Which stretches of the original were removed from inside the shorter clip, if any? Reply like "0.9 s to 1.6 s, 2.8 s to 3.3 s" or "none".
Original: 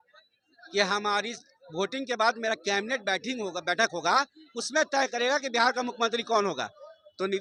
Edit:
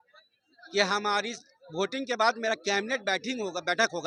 none